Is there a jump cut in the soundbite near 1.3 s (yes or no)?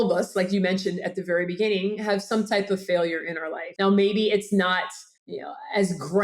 no